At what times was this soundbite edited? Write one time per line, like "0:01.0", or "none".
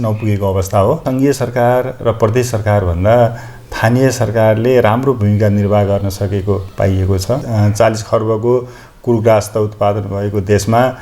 0:01.0
0:07.5